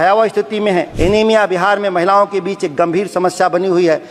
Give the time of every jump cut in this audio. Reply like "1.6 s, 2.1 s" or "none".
0.9 s